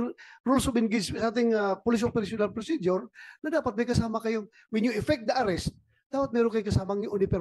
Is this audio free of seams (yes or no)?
yes